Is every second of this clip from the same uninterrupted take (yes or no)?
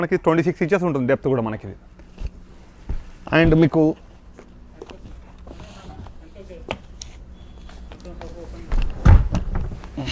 yes